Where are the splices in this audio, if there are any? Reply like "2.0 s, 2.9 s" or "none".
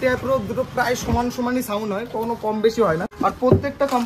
none